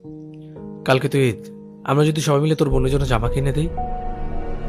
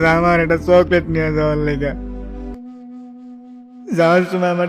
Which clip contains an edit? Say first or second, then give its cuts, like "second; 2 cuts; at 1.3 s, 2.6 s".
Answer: second; 1 cut; at 2.6 s